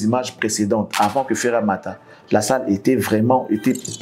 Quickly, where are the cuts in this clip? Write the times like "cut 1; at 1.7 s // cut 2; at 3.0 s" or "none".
none